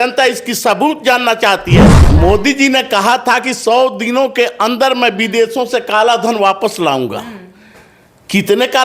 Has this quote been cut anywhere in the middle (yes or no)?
yes